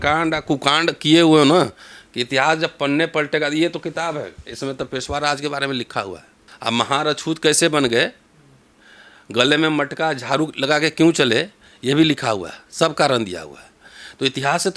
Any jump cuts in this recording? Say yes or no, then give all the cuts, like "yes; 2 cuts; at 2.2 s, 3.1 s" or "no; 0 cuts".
yes; 1 cut; at 6.4 s